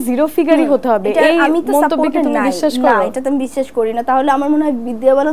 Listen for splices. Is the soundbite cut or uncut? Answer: uncut